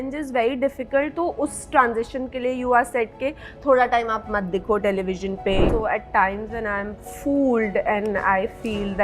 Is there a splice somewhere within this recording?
yes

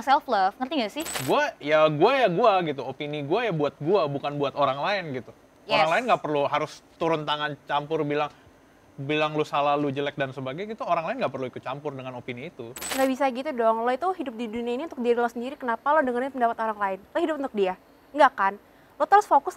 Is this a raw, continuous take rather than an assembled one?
no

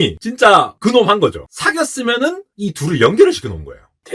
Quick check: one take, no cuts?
no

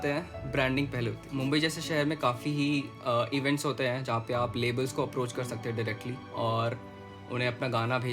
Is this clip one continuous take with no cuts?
yes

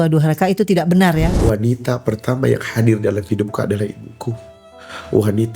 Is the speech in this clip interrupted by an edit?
yes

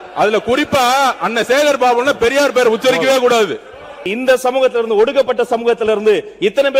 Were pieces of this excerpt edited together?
yes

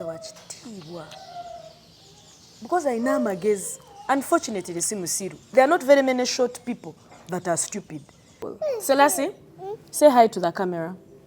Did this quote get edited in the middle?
yes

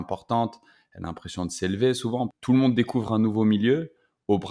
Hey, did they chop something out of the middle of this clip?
yes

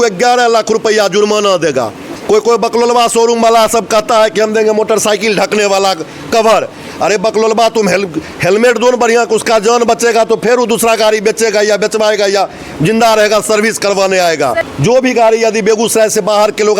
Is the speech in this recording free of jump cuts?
no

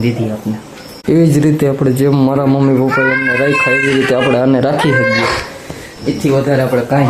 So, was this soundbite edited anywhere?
yes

